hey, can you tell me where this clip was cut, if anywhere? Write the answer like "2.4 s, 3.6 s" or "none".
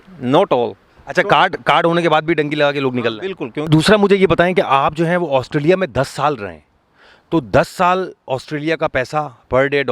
3.6 s